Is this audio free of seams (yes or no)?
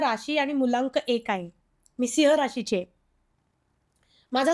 yes